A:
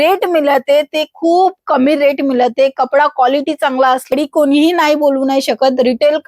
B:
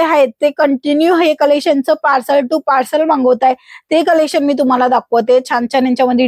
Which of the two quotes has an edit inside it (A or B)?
A